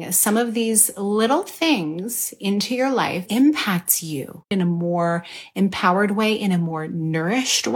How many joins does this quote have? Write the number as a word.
two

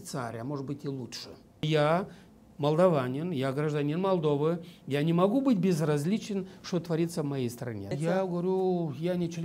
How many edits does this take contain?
two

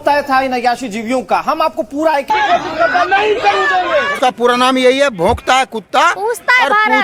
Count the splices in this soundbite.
one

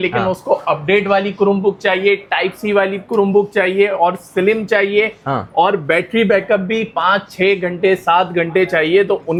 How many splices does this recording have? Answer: zero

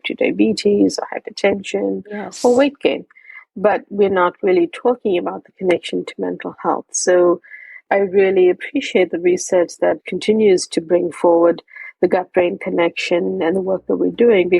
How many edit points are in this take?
two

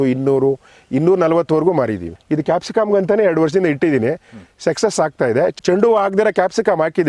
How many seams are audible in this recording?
two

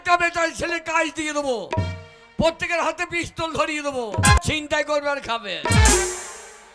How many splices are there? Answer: one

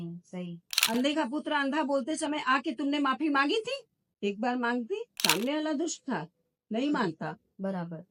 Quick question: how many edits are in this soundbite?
zero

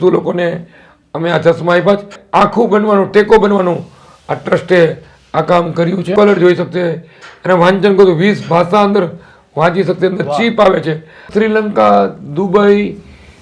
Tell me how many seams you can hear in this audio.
three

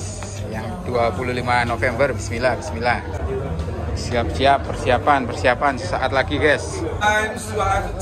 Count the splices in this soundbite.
two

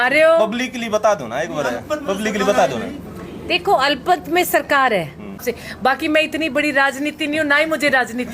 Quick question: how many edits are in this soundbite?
one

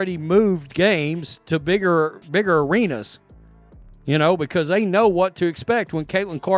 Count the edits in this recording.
zero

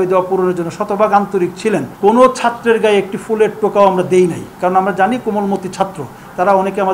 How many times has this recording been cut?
one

